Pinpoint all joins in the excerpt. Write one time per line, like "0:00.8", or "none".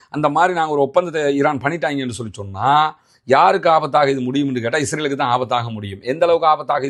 none